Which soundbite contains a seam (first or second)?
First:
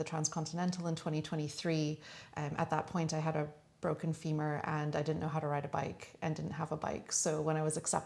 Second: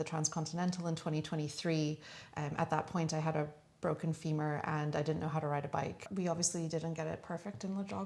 second